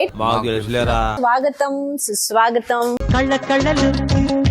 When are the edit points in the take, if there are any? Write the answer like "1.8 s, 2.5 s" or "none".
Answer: 1.1 s